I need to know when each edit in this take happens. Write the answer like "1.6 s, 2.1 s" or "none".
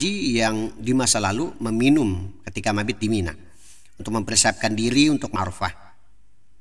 5.3 s